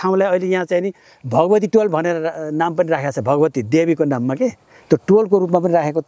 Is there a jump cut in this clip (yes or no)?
no